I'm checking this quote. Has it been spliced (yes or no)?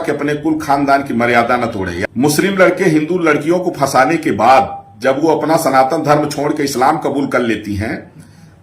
yes